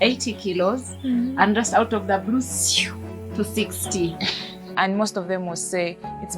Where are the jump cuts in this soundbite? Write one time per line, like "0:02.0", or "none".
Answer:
0:04.6